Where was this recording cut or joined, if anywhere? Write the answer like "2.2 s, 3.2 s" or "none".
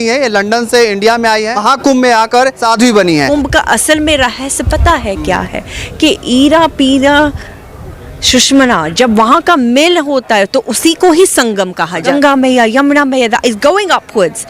1.6 s, 2.6 s, 3.3 s, 12.1 s